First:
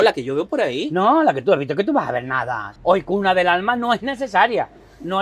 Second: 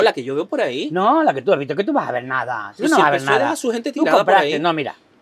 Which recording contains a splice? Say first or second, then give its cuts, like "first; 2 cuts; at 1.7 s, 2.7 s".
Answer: first; 1 cut; at 2.6 s